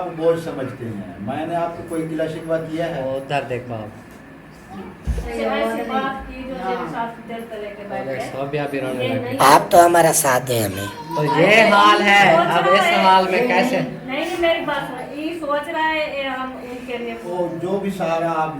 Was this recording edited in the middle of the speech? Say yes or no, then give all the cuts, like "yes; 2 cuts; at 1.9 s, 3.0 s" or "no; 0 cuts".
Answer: yes; 2 cuts; at 5.3 s, 17.3 s